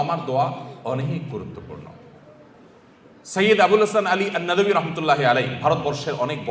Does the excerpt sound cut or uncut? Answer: uncut